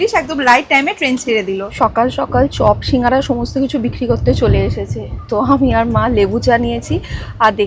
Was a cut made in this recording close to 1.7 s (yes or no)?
yes